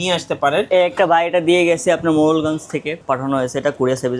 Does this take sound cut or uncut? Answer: cut